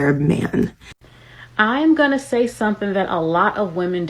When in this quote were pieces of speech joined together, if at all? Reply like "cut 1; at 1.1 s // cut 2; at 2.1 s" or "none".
cut 1; at 0.9 s